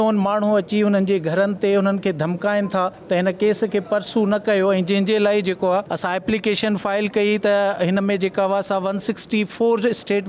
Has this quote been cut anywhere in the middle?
yes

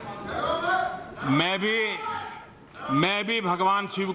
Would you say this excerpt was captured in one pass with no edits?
yes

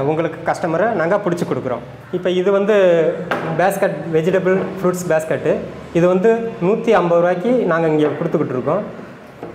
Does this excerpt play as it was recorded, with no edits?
no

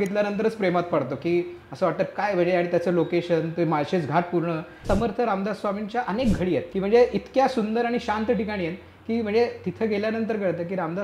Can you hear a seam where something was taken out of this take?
yes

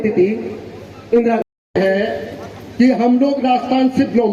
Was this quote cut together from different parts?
yes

